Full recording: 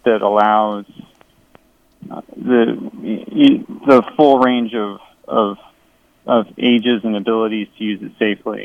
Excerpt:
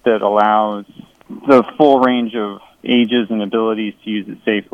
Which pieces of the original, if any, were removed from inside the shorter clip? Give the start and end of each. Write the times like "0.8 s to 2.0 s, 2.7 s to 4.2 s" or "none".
1.3 s to 3.7 s, 5.2 s to 6.5 s

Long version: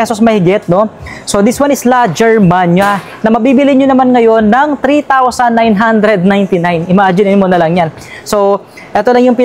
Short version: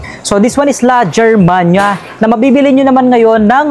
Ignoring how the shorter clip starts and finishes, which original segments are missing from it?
none

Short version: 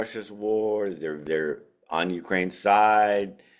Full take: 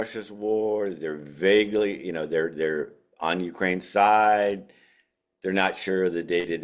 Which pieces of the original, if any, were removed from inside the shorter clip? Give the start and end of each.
1.2 s to 2.5 s

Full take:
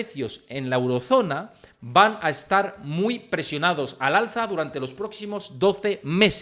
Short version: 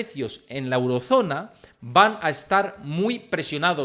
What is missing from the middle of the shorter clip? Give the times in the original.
none

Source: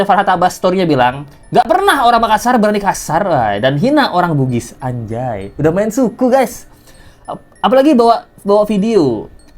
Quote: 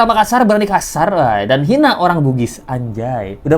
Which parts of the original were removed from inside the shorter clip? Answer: none

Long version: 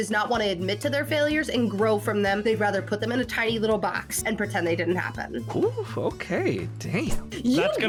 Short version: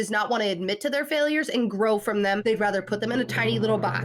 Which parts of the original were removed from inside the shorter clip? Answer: none

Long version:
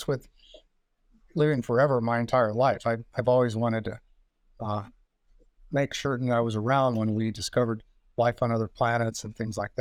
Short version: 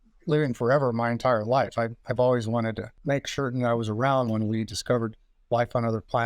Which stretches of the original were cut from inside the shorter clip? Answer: 4.0 s to 5.6 s

